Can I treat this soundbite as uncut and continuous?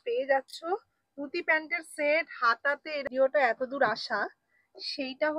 no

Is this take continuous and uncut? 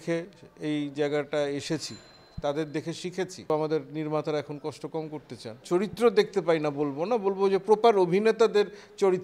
no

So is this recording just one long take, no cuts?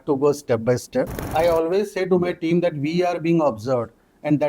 no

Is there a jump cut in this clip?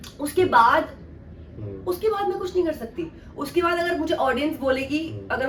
no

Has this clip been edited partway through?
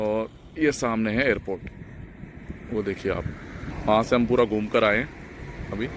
yes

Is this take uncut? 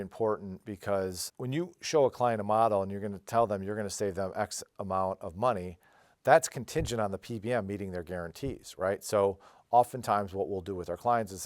no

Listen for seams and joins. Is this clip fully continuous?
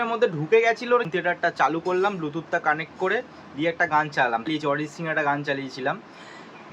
no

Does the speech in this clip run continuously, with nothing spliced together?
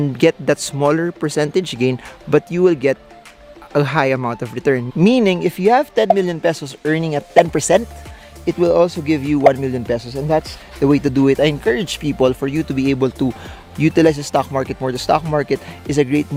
yes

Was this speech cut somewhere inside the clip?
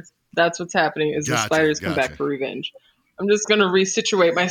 no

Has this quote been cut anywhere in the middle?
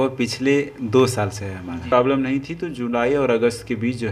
yes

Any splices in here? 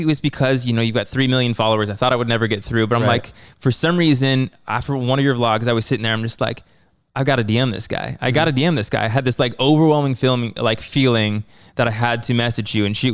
no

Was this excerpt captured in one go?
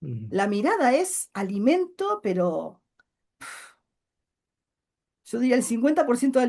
yes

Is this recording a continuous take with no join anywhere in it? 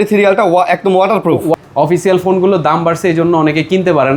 no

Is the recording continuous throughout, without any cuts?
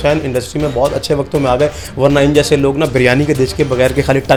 yes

